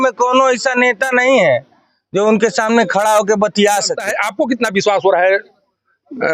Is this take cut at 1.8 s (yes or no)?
no